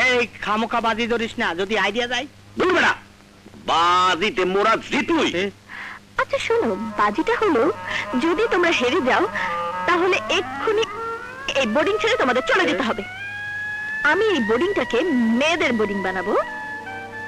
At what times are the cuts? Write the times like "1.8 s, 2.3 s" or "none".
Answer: none